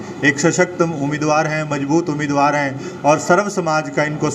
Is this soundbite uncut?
yes; 0 cuts

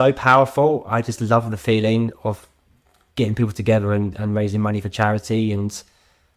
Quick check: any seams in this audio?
no; 0 cuts

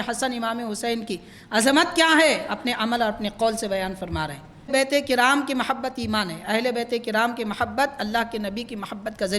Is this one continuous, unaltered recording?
no; 1 cut; at 4.7 s

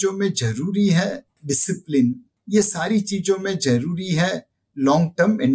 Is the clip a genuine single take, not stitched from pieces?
no; 2 cuts; at 1.3 s, 2.3 s

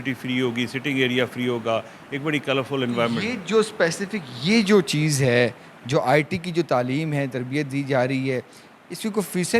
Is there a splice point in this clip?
no; 0 cuts

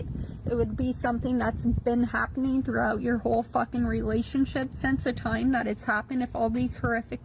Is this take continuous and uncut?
yes; 0 cuts

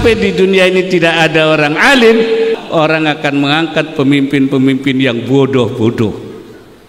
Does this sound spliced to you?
yes; 1 cut; at 2.6 s

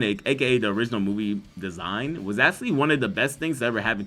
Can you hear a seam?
yes; 1 cut; at 1.6 s

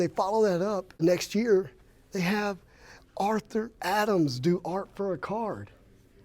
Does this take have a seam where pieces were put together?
yes; 1 cut; at 1.0 s

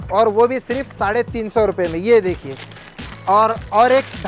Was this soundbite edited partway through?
no; 0 cuts

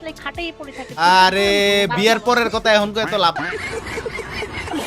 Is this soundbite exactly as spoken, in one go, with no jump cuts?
yes; 0 cuts

